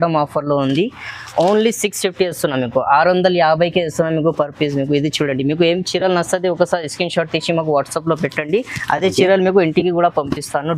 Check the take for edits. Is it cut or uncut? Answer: uncut